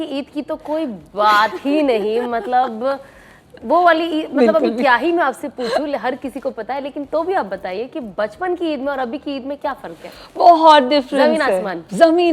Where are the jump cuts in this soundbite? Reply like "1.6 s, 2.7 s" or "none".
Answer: none

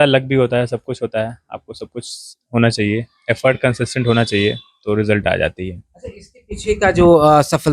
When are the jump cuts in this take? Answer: none

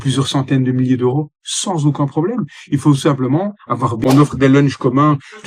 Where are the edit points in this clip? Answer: 4.0 s

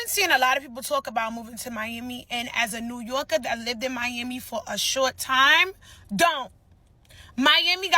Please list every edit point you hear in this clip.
none

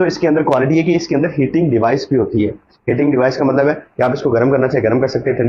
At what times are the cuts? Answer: none

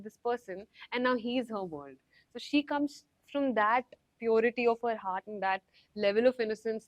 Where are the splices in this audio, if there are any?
none

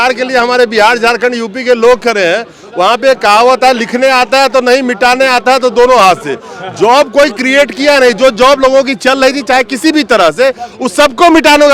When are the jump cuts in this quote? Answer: none

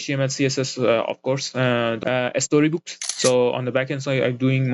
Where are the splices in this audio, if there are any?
2.0 s, 3.1 s

